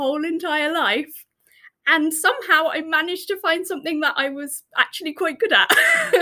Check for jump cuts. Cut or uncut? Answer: uncut